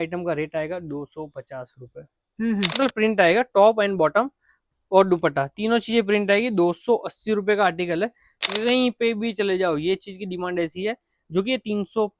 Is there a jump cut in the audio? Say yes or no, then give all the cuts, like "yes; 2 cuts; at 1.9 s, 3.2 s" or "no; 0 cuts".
yes; 2 cuts; at 2.8 s, 8.5 s